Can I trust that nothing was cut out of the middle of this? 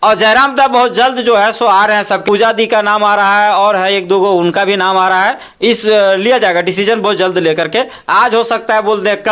no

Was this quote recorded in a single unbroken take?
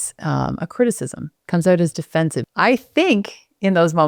no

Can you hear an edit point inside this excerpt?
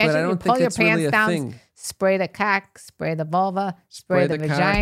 no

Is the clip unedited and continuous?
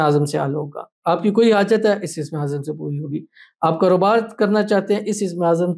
yes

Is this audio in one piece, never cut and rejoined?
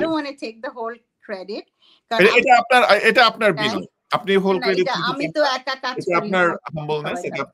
yes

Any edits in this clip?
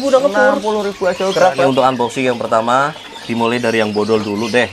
yes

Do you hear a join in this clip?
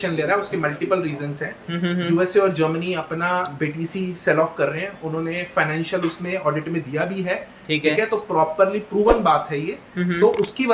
no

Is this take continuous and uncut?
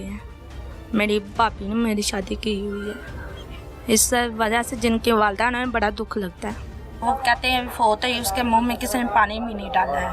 no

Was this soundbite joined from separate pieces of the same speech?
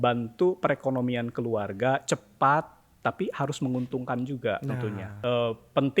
yes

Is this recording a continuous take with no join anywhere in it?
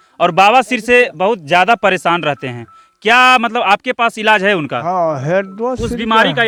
yes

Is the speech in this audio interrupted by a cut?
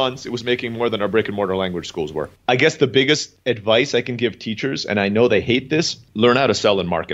yes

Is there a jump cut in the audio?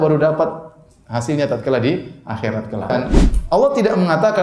yes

